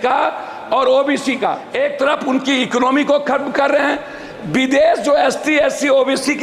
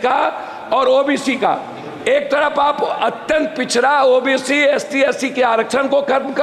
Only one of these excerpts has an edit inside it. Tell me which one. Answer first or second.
first